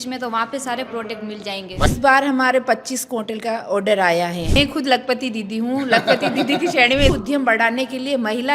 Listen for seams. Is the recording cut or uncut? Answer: cut